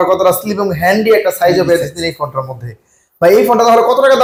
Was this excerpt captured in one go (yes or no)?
yes